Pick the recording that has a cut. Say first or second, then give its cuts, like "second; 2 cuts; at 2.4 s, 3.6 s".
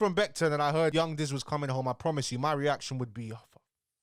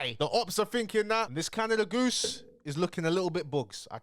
second; 1 cut; at 1.3 s